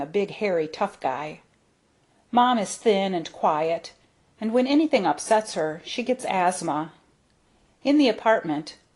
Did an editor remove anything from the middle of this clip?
yes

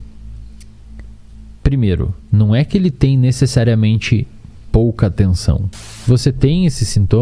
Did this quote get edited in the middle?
yes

